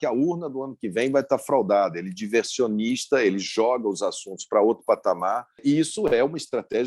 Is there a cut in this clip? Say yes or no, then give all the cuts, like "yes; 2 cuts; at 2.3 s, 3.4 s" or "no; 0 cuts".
yes; 1 cut; at 5.6 s